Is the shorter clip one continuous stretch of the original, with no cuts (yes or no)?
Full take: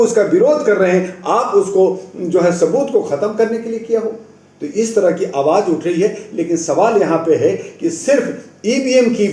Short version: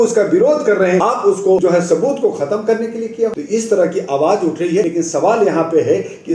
no